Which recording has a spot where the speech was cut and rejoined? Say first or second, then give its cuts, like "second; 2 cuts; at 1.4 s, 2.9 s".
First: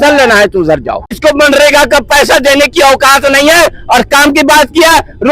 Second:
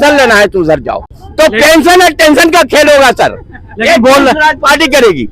first; 1 cut; at 1.2 s